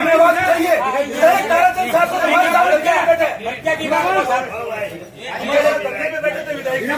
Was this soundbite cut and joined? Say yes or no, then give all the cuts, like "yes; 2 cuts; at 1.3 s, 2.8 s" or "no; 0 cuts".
no; 0 cuts